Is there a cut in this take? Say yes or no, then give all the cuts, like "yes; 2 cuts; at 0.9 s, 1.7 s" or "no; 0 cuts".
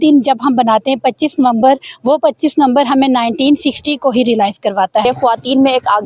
yes; 1 cut; at 5.0 s